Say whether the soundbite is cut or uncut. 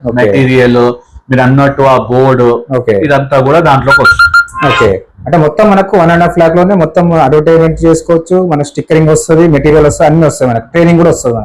uncut